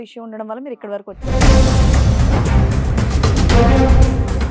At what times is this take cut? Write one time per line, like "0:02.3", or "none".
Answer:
0:01.3